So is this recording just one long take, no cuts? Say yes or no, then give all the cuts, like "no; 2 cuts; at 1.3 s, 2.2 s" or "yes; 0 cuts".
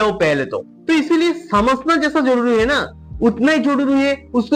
yes; 0 cuts